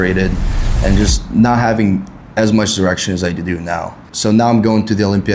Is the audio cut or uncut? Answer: cut